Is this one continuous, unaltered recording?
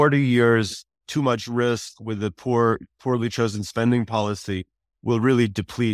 no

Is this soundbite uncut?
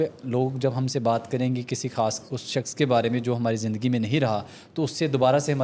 yes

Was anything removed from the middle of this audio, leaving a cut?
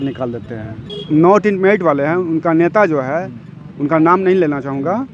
yes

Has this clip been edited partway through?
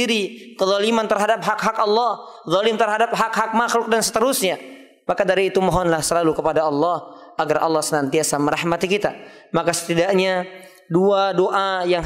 no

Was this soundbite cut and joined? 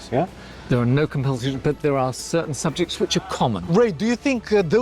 yes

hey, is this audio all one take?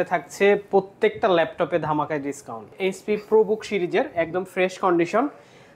no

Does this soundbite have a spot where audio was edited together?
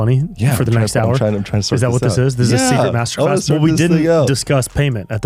no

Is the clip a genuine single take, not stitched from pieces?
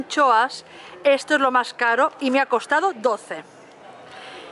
yes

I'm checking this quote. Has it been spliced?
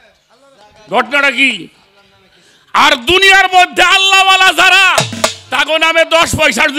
no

